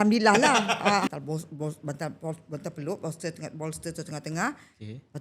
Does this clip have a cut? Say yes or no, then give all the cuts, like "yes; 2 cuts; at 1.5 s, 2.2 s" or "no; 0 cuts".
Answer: yes; 1 cut; at 1.1 s